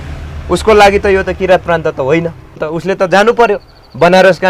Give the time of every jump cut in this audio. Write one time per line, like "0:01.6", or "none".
0:02.7

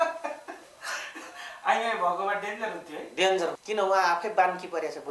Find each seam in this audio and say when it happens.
0:03.6

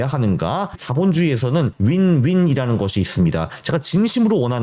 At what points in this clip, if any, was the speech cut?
0:00.8
0:01.7

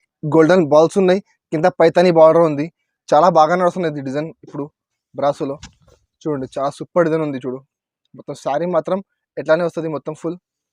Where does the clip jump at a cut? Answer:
none

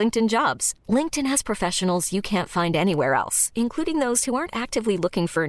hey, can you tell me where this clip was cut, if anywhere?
none

